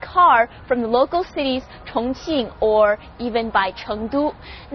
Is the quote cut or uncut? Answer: cut